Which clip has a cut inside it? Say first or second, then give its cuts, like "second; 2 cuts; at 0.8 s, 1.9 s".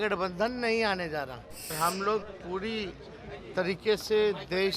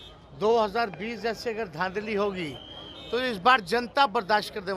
first; 1 cut; at 1.7 s